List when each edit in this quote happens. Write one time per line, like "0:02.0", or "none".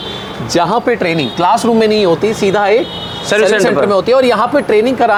none